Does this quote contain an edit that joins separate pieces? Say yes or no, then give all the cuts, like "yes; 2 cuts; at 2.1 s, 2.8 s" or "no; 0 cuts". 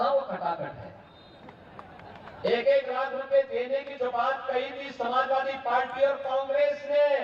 no; 0 cuts